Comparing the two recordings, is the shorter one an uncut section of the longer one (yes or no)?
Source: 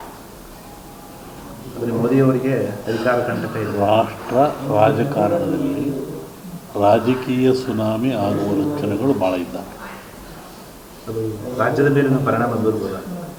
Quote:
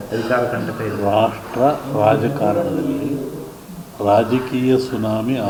yes